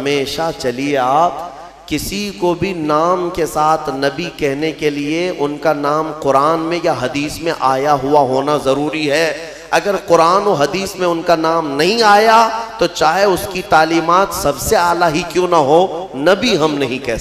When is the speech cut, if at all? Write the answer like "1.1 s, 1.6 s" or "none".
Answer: none